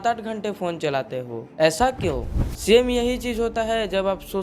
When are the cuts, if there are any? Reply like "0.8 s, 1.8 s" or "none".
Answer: 2.3 s